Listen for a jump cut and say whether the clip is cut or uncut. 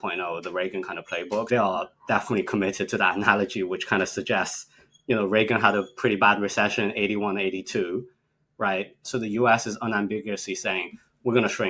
cut